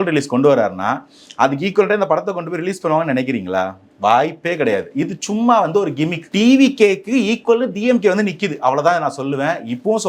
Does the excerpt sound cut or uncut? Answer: cut